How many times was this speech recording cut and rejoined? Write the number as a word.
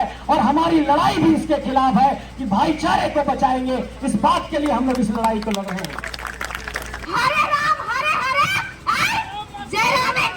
one